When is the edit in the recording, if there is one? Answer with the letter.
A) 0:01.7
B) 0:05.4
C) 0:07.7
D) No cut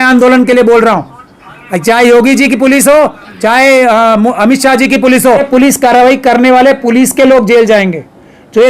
B